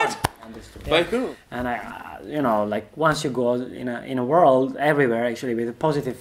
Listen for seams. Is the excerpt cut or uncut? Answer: cut